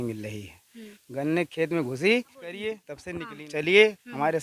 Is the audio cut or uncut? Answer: cut